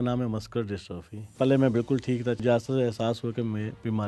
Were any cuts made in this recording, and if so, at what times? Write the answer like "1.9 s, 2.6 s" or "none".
1.4 s, 2.4 s